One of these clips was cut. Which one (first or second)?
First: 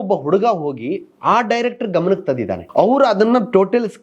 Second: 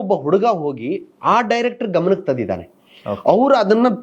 first